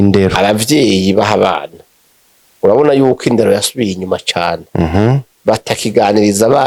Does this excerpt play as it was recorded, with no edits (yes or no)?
yes